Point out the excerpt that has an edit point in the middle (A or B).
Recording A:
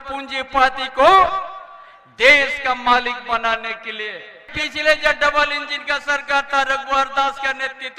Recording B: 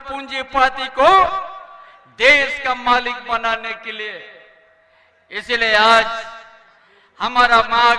A